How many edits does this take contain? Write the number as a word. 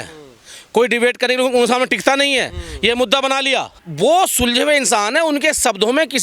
one